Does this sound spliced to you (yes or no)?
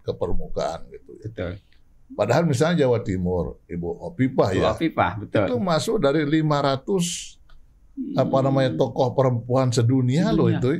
no